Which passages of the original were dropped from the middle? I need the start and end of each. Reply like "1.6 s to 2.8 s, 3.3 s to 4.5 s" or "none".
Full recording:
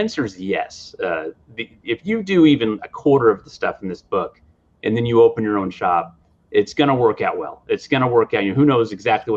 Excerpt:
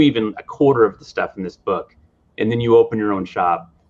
none